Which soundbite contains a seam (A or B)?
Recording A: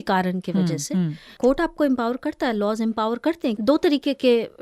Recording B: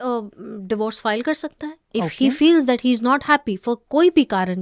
A